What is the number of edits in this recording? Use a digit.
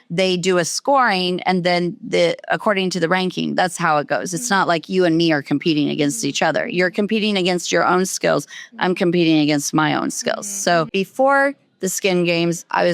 1